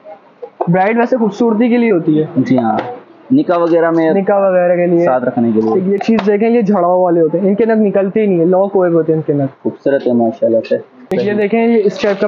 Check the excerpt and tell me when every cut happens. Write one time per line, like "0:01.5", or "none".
0:05.7
0:11.0